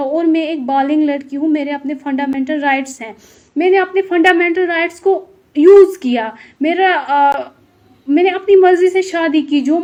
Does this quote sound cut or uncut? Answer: uncut